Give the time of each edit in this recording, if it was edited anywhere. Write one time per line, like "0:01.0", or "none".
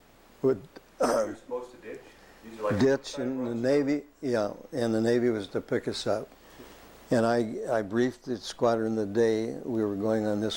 0:06.4